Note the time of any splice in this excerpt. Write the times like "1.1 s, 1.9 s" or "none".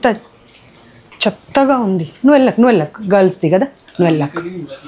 none